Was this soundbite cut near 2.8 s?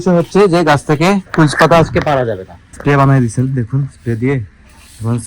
yes; 1 cut; at 2.8 s

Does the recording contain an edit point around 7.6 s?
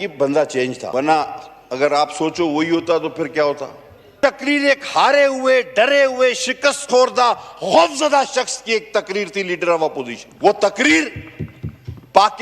no; 3 cuts; at 0.8 s, 4.1 s, 10.2 s

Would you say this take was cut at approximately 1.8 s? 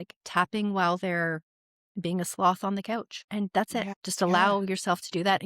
no; 2 cuts; at 3.2 s, 3.8 s

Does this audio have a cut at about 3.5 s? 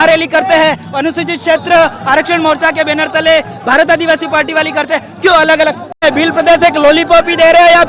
no; 1 cut; at 6.0 s

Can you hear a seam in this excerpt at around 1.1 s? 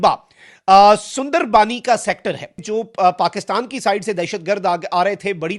no; 1 cut; at 2.6 s

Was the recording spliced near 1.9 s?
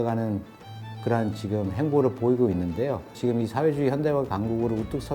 no; 1 cut; at 3.1 s

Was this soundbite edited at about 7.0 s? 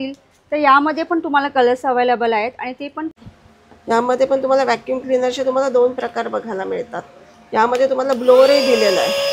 no; 1 cut; at 3.2 s

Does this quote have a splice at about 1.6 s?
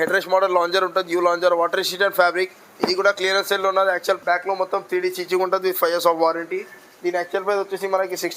no; 1 cut; at 4.2 s

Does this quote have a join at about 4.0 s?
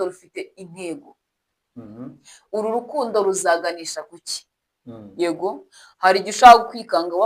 no; 0 cuts

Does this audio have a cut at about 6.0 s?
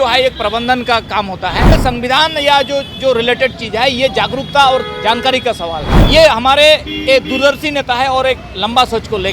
yes; 2 cuts; at 1.7 s, 6.0 s

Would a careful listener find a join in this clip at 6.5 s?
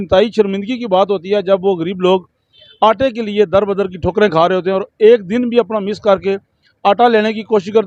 no; 0 cuts

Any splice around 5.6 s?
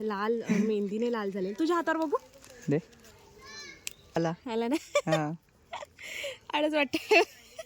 no; 1 cut; at 4.2 s

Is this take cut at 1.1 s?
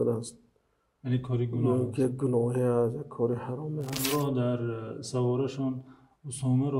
no; 1 cut; at 3.9 s

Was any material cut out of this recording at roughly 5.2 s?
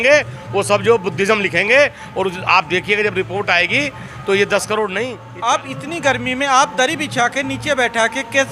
yes; 1 cut; at 5.2 s

